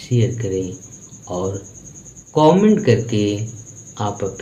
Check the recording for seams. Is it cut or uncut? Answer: uncut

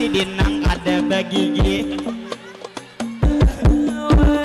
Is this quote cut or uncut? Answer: cut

